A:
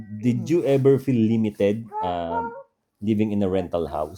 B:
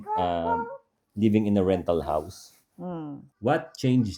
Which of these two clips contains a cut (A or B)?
B